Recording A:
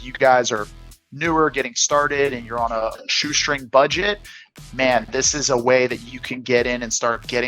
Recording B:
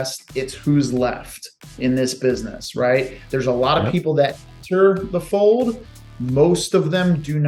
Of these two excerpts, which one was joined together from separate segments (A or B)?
A